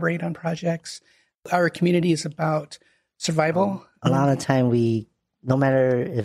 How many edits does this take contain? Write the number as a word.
two